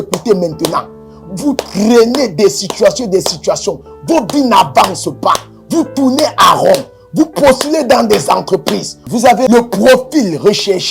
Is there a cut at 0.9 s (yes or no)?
no